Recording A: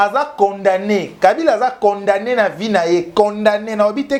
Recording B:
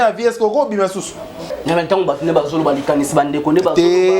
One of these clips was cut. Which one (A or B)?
B